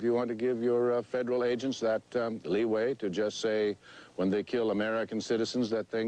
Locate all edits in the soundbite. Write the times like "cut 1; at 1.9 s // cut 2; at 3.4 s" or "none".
cut 1; at 3.7 s